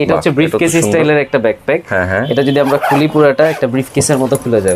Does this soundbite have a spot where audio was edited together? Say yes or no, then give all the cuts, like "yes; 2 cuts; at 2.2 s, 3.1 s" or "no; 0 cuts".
no; 0 cuts